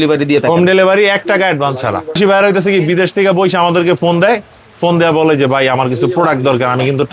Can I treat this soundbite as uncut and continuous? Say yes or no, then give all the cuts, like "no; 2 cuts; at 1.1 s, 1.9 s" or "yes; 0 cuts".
no; 1 cut; at 2.2 s